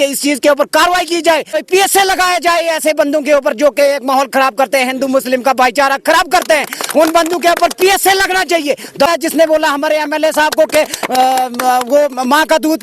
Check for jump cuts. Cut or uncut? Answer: cut